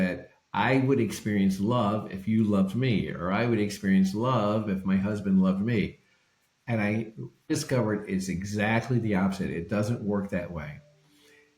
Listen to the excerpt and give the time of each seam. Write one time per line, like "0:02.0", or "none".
0:07.5